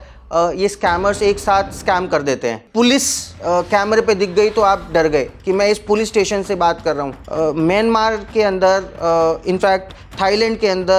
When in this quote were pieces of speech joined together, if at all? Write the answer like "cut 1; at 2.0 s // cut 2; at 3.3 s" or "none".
cut 1; at 2.6 s // cut 2; at 7.2 s